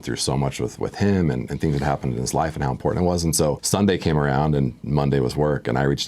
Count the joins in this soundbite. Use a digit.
1